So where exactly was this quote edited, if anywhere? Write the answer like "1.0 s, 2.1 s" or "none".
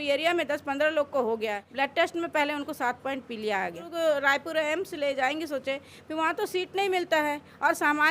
1.7 s, 3.8 s